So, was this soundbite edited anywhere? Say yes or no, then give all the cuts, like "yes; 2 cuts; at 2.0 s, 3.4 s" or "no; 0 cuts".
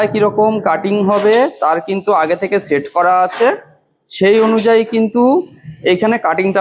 no; 0 cuts